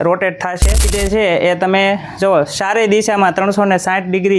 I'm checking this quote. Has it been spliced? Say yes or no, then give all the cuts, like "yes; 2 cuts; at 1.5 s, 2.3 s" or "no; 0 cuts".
yes; 1 cut; at 0.9 s